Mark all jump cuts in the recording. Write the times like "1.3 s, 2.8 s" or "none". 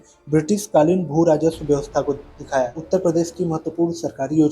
2.8 s